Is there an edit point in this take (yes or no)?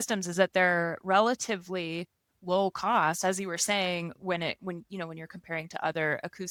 no